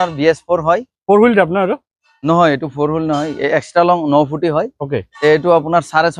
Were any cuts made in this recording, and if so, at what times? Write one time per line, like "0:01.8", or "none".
none